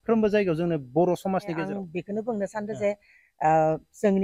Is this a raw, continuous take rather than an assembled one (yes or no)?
no